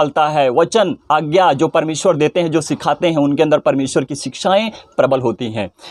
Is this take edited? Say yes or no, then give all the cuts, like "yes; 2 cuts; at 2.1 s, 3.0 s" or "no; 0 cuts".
no; 0 cuts